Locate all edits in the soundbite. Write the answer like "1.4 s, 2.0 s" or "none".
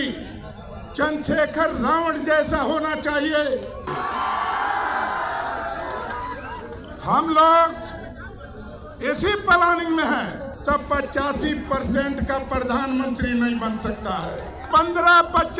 3.8 s, 10.5 s, 14.6 s